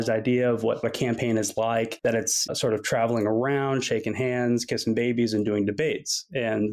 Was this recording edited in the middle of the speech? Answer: yes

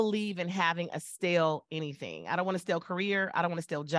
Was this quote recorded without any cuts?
yes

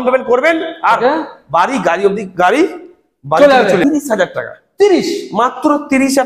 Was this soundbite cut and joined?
yes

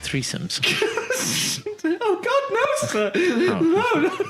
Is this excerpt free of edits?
yes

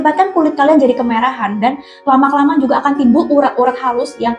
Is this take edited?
no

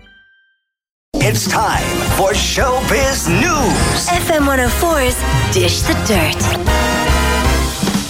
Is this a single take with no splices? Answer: no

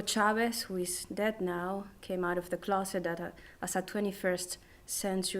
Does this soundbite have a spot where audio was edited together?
yes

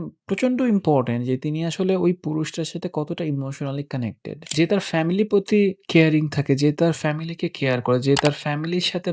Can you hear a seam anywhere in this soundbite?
yes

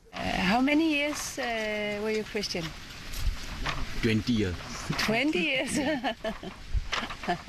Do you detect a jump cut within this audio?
no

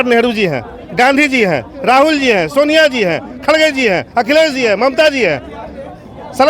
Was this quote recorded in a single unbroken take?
yes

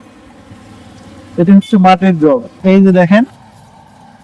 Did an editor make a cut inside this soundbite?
yes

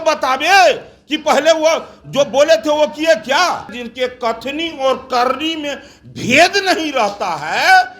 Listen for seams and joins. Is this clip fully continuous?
no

